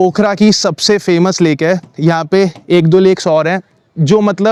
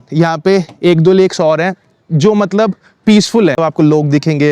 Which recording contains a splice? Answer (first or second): second